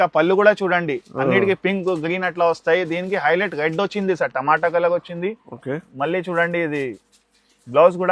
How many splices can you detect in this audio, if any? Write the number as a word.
zero